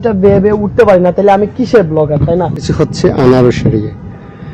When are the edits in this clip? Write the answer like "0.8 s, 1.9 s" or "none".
2.7 s

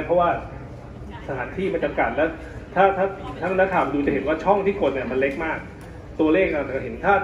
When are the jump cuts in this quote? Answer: none

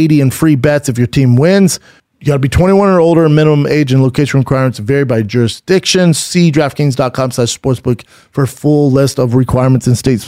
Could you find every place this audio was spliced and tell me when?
1.9 s

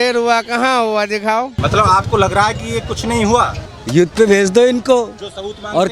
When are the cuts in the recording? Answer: 1.6 s, 3.7 s

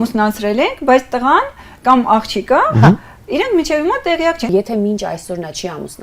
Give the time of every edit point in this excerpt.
4.5 s

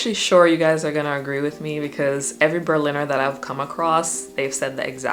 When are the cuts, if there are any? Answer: none

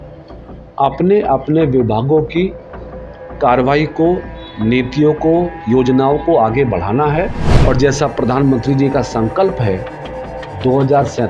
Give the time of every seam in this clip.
7.5 s

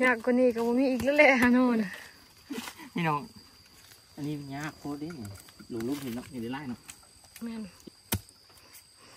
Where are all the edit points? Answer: 7.8 s

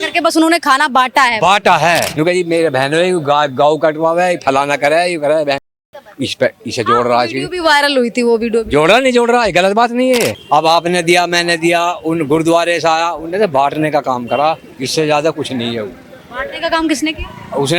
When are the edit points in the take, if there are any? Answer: 2.1 s, 10.4 s

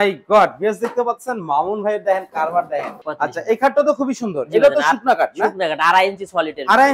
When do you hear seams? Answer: 3.0 s

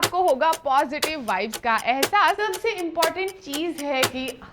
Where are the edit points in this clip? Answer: 2.4 s

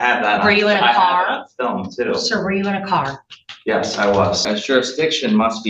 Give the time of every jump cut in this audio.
4.4 s

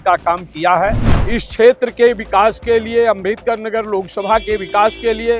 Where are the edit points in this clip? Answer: 1.1 s

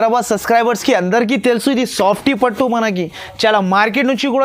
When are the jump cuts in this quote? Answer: none

